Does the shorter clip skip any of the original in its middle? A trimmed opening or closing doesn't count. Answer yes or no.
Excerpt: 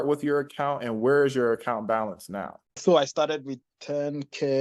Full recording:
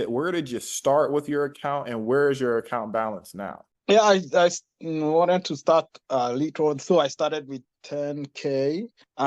yes